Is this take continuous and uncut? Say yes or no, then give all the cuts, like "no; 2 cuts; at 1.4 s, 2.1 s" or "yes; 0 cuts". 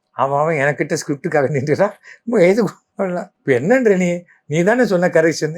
no; 1 cut; at 3.1 s